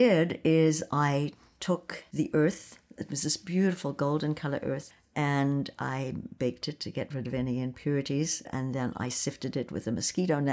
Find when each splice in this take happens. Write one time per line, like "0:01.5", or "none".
0:02.0
0:08.5